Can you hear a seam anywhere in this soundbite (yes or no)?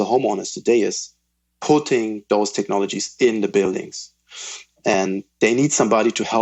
no